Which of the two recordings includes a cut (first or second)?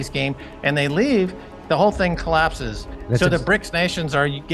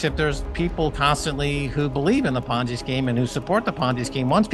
first